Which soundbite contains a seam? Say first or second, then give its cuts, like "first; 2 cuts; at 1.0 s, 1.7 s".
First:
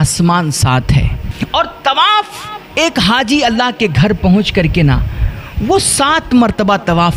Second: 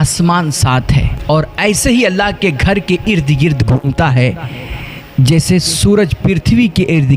second; 1 cut; at 1.1 s